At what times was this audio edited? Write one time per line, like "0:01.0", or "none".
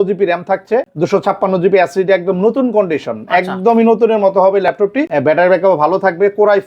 0:00.9
0:05.1